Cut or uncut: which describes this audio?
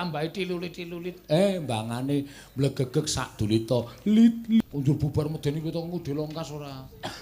cut